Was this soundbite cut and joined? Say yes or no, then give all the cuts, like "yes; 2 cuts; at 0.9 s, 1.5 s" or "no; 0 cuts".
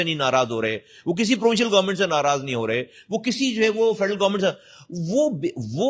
no; 0 cuts